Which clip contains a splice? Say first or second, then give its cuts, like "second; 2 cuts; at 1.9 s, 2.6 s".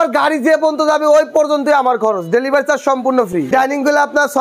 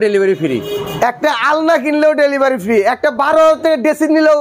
first; 1 cut; at 3.5 s